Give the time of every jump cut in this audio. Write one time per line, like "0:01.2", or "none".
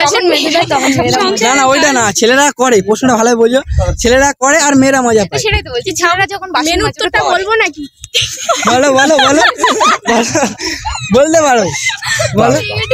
0:11.4